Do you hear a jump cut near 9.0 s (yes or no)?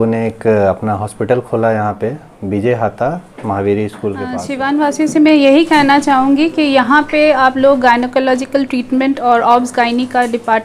no